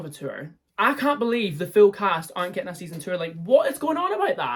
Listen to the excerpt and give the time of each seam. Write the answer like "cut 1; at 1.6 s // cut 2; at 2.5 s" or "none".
none